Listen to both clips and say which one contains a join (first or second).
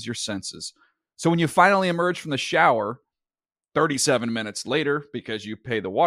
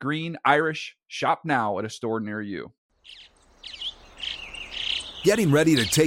second